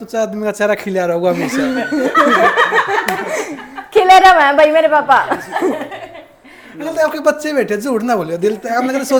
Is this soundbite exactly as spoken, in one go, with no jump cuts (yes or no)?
yes